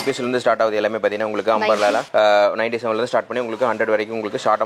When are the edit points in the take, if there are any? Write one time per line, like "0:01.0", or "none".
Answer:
0:02.1